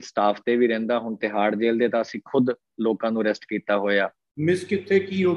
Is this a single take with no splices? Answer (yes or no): no